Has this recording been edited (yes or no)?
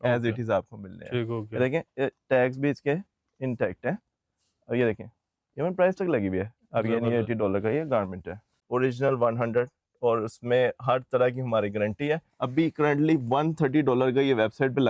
yes